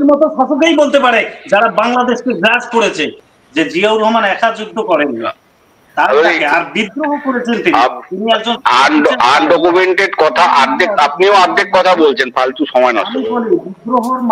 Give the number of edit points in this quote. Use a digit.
1